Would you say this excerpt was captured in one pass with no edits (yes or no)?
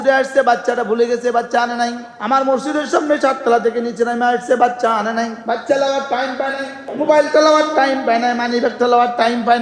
no